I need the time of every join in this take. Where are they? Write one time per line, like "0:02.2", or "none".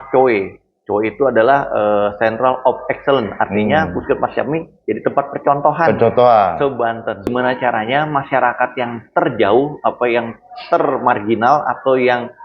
0:07.3